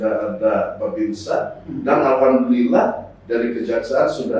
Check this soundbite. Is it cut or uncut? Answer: uncut